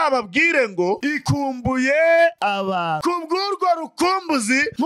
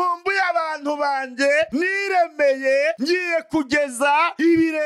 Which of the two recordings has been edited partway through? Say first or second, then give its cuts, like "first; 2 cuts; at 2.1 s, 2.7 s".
first; 1 cut; at 3.0 s